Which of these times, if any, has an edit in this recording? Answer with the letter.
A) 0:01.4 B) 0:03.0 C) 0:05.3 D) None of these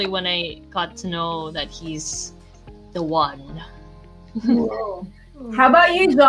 D